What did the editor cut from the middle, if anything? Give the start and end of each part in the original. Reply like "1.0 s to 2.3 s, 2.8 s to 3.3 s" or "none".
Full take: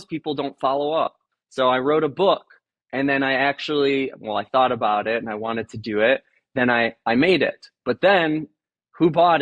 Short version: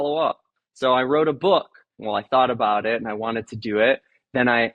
2.7 s to 4.2 s